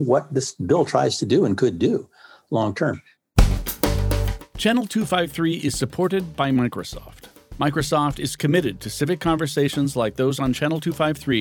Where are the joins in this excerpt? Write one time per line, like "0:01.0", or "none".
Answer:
0:03.2